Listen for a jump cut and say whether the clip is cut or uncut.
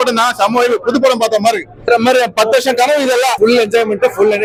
uncut